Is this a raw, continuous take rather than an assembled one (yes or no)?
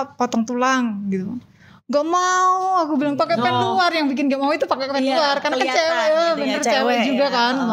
yes